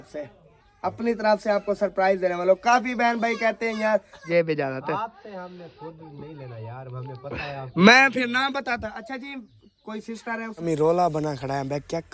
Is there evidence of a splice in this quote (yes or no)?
yes